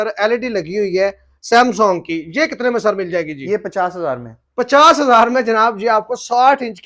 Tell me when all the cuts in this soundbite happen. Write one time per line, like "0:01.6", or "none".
none